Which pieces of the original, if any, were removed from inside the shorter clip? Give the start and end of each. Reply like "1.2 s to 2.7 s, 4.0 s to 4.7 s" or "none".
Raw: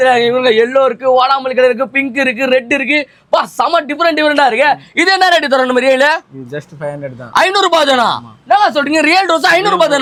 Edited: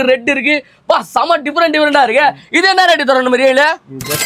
none